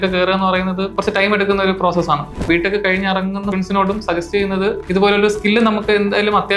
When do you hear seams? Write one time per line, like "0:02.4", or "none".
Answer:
0:00.9
0:02.4
0:03.5
0:04.8

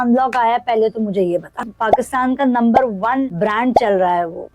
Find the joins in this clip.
0:01.7
0:03.3

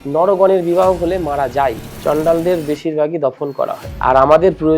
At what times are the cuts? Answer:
0:01.9
0:03.8

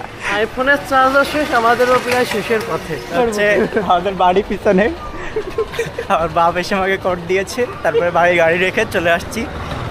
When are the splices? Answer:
0:03.1

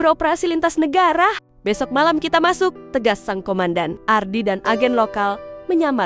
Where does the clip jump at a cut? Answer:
0:01.5
0:02.8

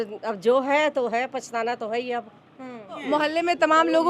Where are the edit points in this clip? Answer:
0:03.0

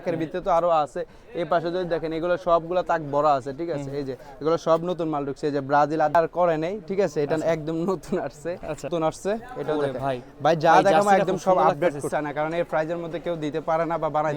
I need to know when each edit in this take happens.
0:06.1
0:08.9
0:12.1

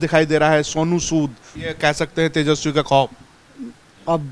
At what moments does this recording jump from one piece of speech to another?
0:01.6

